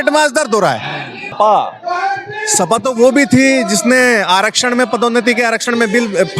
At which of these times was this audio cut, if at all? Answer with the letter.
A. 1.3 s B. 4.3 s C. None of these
A